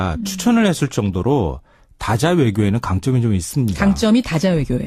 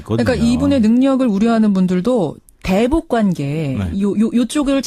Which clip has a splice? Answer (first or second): first